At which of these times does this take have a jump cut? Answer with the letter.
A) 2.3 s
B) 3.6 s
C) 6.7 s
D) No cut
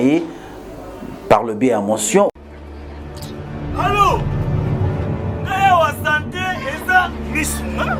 A